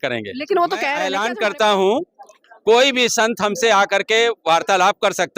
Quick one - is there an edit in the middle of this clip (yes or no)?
yes